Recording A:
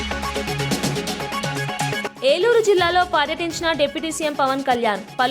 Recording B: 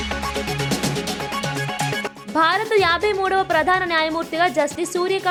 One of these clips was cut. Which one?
A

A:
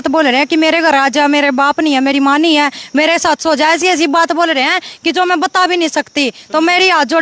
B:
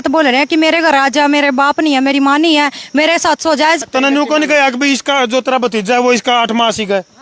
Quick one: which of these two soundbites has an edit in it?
B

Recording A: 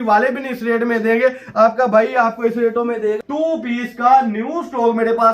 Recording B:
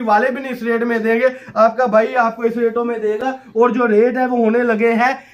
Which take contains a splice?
A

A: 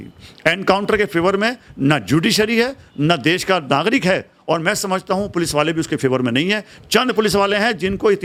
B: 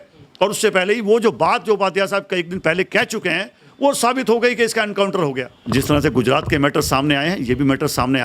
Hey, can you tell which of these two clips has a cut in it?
B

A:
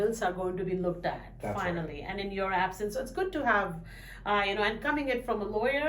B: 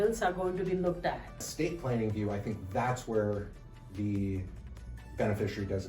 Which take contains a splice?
B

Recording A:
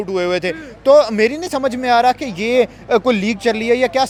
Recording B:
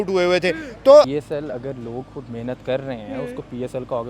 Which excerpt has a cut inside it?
B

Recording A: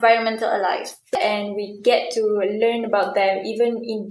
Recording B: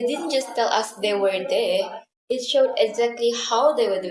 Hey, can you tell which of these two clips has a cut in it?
A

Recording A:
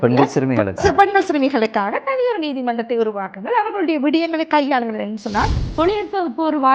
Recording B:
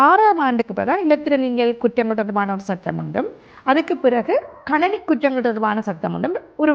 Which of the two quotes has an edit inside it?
A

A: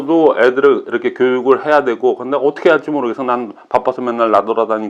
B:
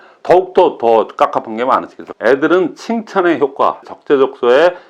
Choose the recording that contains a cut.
B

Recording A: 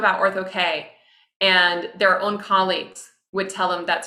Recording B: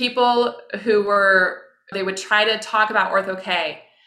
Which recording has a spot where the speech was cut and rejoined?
B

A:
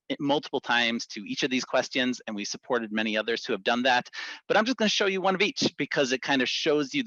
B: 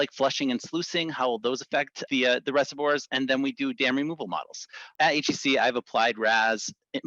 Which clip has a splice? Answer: B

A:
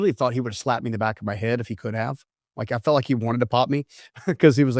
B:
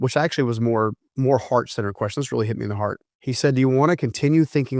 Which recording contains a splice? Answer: B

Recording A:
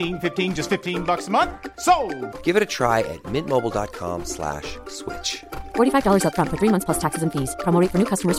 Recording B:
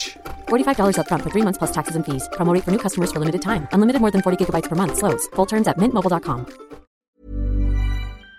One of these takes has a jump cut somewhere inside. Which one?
B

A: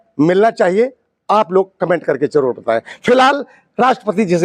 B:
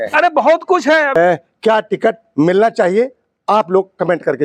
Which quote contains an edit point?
B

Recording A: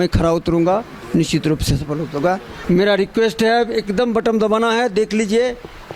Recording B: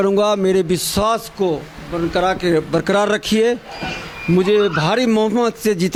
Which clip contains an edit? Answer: A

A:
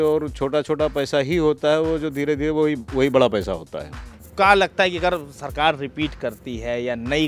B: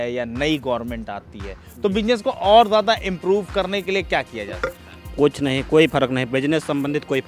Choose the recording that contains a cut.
A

